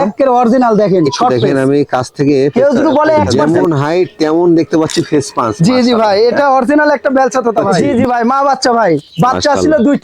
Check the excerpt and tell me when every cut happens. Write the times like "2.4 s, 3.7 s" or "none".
3.3 s, 7.7 s